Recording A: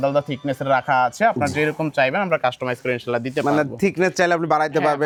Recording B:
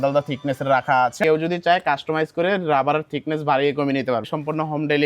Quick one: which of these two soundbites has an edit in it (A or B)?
B